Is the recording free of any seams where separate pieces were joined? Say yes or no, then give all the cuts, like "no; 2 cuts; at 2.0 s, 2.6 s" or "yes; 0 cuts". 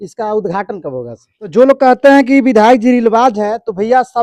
no; 1 cut; at 1.3 s